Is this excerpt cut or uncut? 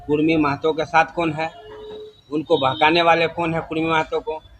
uncut